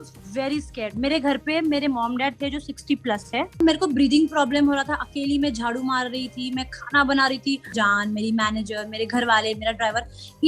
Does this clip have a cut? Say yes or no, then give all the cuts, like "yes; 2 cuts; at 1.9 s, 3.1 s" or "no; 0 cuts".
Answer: yes; 2 cuts; at 3.6 s, 7.7 s